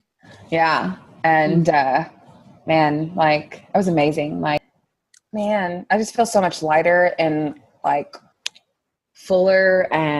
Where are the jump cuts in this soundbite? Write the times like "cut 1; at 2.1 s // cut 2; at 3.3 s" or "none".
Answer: cut 1; at 4.7 s